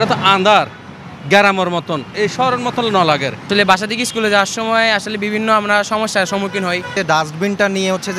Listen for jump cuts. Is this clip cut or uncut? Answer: cut